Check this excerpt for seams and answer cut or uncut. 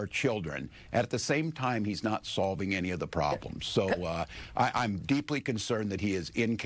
uncut